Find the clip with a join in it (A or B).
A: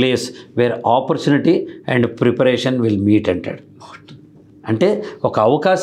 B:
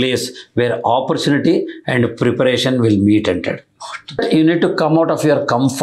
B